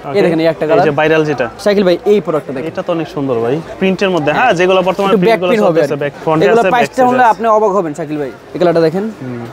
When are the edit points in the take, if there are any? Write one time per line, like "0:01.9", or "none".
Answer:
0:01.5
0:03.8
0:06.1
0:08.4